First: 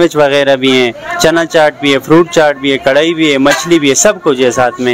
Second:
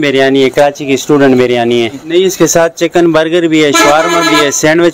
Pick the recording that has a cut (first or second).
second